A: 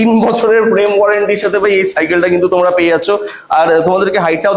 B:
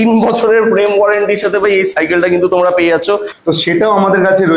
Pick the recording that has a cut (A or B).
B